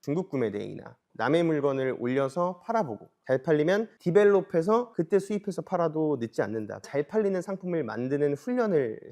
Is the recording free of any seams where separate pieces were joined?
yes; 0 cuts

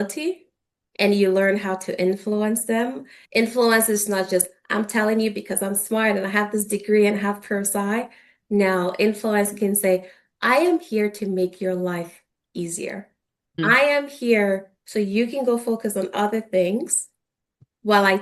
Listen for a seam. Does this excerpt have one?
yes; 1 cut; at 3.2 s

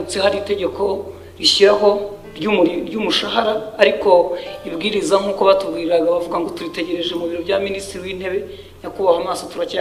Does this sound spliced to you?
no; 0 cuts

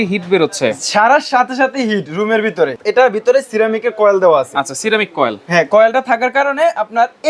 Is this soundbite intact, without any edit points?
no; 1 cut; at 2.7 s

